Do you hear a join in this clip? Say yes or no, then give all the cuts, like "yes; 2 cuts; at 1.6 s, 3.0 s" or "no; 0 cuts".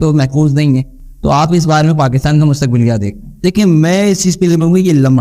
no; 0 cuts